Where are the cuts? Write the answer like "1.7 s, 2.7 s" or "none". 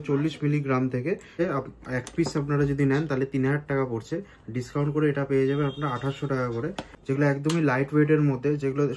1.4 s, 6.9 s